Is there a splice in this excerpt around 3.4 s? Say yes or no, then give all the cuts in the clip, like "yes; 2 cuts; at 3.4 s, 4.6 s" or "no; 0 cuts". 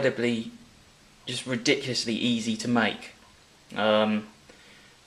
yes; 1 cut; at 3.4 s